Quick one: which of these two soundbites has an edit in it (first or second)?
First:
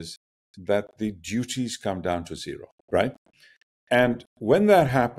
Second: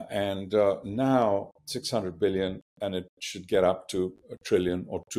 first